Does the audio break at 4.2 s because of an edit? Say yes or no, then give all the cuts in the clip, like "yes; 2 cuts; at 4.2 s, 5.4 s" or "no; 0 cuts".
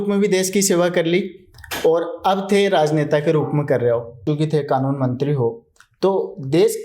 yes; 1 cut; at 4.2 s